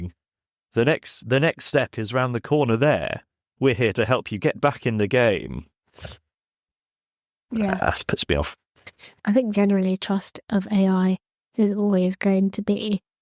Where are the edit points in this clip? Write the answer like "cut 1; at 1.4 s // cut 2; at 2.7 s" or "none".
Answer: cut 1; at 9.2 s